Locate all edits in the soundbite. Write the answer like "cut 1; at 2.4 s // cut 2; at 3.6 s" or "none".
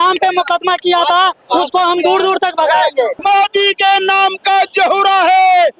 cut 1; at 3.2 s